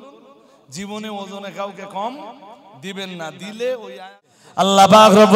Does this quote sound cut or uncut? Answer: cut